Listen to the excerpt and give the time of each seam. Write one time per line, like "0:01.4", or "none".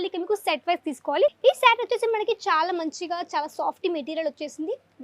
0:01.4